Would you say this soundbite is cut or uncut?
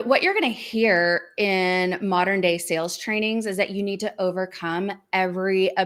uncut